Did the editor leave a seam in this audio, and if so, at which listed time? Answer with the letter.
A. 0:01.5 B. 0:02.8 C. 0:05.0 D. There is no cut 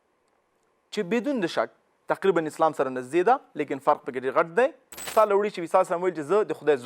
C